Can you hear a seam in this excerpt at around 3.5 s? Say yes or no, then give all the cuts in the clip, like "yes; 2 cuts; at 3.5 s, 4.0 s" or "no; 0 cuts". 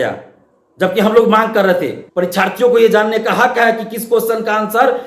no; 1 cut; at 2.0 s